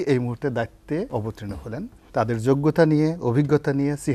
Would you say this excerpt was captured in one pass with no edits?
no; 1 cut; at 1.4 s

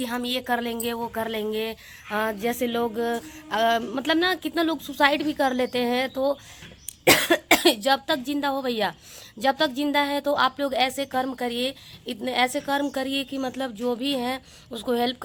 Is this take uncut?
yes; 0 cuts

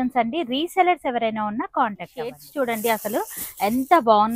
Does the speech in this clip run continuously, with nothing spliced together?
no; 1 cut; at 2.4 s

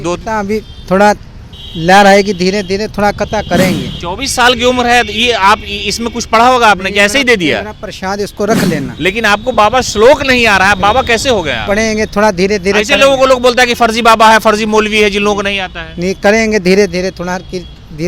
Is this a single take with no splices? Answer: no; 2 cuts; at 3.9 s, 8.9 s

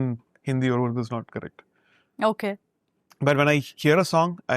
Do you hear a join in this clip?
no; 0 cuts

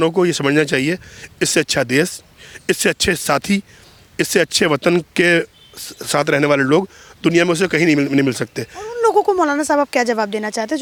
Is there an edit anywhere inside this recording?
no; 0 cuts

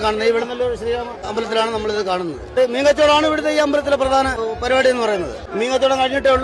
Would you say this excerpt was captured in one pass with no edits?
no; 4 cuts; at 1.3 s, 2.5 s, 4.4 s, 5.4 s

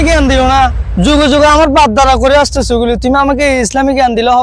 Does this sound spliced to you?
no; 0 cuts

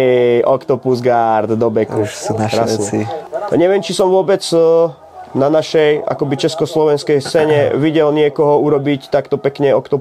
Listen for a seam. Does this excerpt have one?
yes; 1 cut; at 3.2 s

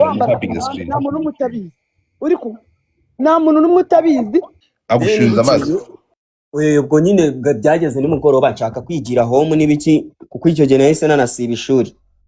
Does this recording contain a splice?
yes; 1 cut; at 4.6 s

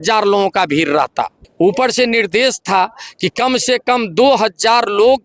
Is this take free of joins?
no; 1 cut; at 1.4 s

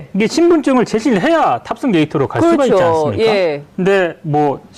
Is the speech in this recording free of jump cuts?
yes; 0 cuts

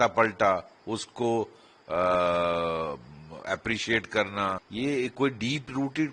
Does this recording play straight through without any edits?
no; 1 cut; at 4.7 s

